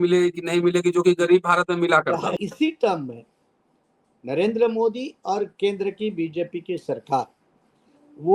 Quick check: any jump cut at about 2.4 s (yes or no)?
yes